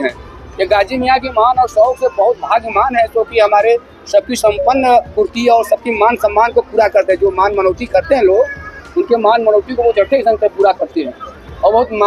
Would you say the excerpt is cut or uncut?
uncut